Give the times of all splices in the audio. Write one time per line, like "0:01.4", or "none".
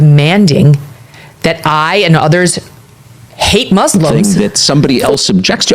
0:04.2